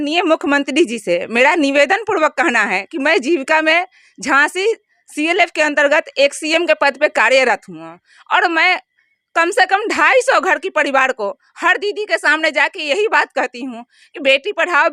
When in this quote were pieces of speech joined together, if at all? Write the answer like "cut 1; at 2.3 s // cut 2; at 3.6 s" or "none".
none